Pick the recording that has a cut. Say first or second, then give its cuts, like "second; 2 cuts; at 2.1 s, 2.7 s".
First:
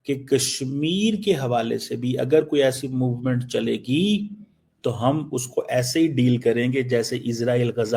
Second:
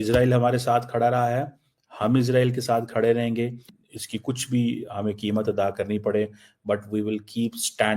second; 1 cut; at 3.7 s